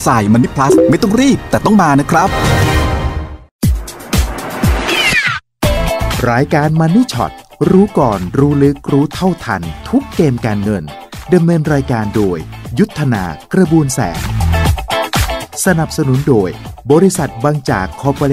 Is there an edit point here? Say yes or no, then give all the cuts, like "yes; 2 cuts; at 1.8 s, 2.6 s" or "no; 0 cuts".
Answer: yes; 1 cut; at 3.4 s